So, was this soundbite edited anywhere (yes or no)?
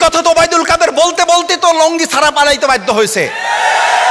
no